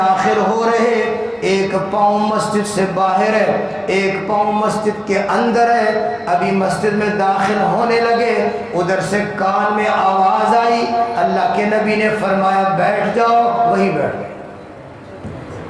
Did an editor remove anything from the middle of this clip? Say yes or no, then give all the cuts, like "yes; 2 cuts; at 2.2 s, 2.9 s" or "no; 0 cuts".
no; 0 cuts